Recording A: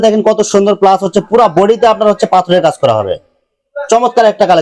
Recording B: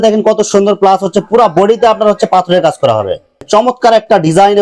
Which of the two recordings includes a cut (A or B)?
B